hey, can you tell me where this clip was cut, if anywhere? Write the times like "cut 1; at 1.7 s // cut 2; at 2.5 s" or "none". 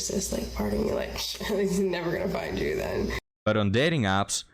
cut 1; at 3.3 s